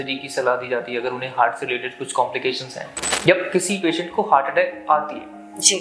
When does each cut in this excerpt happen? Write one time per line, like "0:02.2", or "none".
0:03.0